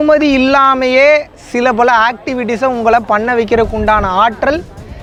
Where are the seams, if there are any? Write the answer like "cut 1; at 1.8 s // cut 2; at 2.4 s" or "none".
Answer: none